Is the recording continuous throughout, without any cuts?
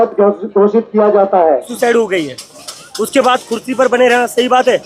no; 1 cut; at 1.7 s

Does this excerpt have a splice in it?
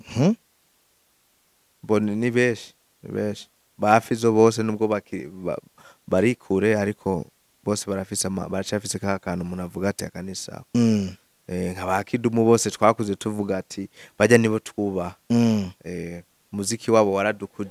no; 0 cuts

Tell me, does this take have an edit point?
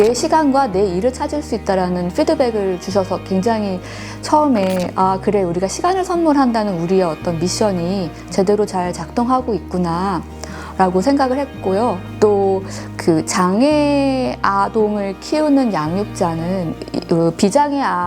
no; 0 cuts

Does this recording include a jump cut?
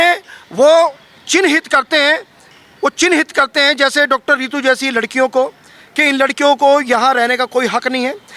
no; 0 cuts

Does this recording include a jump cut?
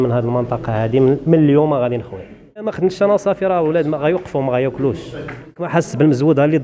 yes; 2 cuts; at 2.8 s, 5.7 s

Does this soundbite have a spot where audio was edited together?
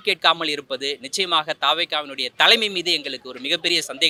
no; 0 cuts

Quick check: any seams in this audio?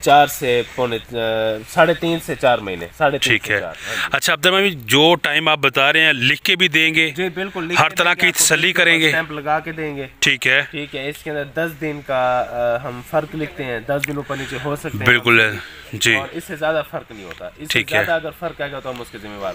no; 0 cuts

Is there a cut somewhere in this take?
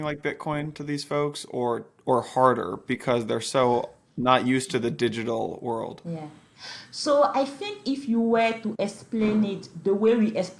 no; 0 cuts

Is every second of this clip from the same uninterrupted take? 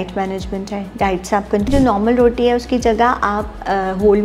no; 1 cut; at 1.7 s

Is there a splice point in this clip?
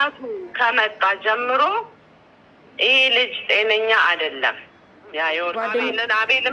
yes; 1 cut; at 5.5 s

